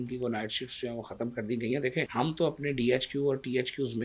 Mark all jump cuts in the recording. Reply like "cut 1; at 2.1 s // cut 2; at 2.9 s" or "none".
cut 1; at 2.1 s